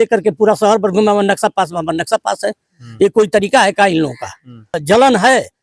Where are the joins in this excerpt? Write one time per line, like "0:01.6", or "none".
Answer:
0:04.7